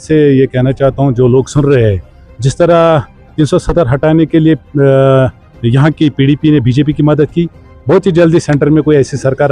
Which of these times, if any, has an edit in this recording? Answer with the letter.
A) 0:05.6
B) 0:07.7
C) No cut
C